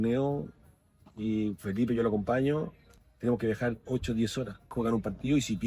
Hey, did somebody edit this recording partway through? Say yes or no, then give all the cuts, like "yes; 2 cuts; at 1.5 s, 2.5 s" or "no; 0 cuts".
yes; 2 cuts; at 3.1 s, 4.7 s